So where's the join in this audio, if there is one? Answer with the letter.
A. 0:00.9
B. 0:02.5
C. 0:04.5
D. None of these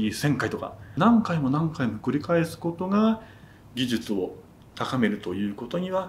A